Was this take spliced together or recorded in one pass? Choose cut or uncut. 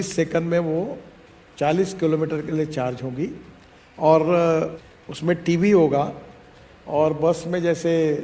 cut